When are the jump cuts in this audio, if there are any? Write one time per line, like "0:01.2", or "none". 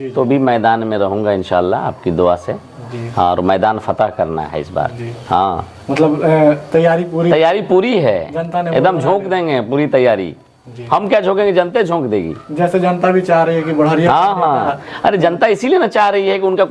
none